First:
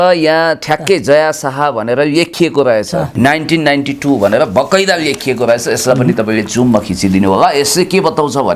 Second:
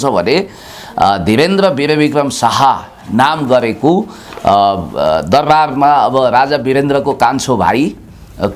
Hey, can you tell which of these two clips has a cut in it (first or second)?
first